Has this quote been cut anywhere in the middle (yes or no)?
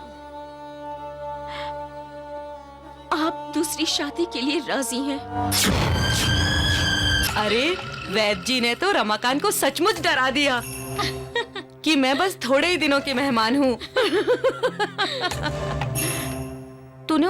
yes